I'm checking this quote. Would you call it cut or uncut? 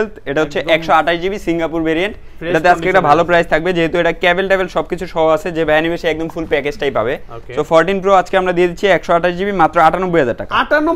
uncut